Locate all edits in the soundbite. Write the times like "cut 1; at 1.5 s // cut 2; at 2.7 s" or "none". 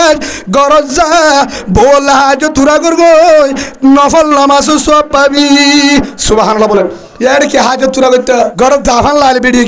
cut 1; at 7.0 s // cut 2; at 8.5 s

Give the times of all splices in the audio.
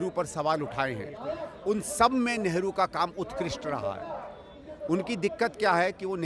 none

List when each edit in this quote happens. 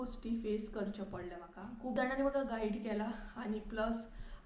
cut 1; at 2.0 s

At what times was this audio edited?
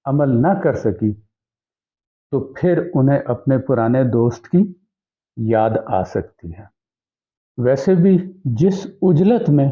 none

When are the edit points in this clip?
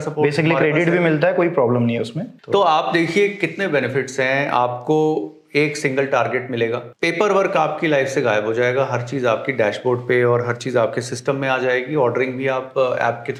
none

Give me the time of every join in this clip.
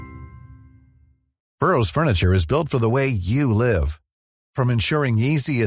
cut 1; at 1.4 s

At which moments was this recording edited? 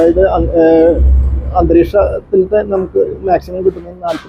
none

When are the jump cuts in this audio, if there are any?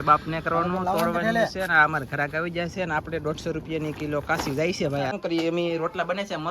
cut 1; at 5.1 s

